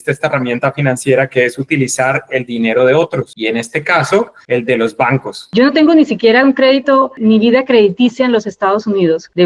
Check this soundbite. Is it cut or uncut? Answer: cut